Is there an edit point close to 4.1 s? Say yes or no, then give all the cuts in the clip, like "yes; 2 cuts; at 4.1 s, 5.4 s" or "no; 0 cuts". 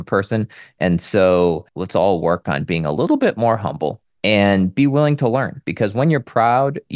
yes; 2 cuts; at 1.7 s, 4.1 s